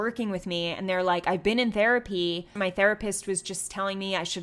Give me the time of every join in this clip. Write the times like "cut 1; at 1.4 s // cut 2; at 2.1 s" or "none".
cut 1; at 2.5 s